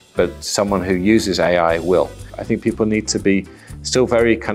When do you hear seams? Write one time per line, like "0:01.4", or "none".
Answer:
0:02.3